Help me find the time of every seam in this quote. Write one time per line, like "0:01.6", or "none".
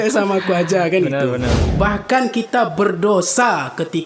0:01.6